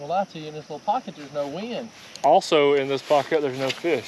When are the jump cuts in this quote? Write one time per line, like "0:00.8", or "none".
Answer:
0:02.0